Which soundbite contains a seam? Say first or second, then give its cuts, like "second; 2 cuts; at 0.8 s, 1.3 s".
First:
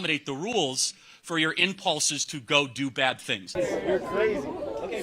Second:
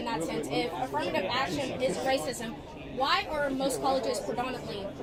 first; 1 cut; at 3.5 s